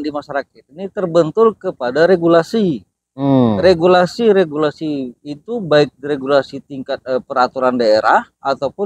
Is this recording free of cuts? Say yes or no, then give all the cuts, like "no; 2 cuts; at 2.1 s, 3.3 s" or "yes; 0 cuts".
yes; 0 cuts